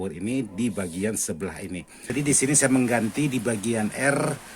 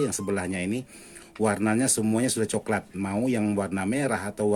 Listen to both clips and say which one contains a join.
first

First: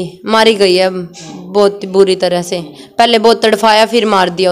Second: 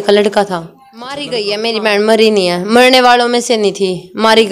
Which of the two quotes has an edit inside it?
second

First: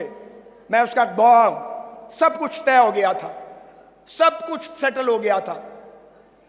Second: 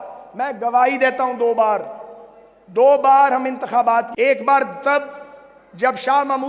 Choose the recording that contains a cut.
second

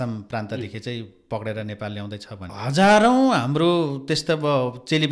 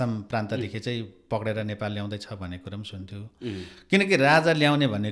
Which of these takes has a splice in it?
first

